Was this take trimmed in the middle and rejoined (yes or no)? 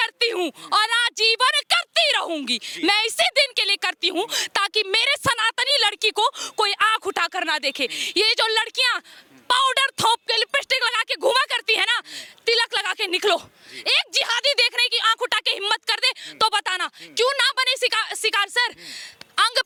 no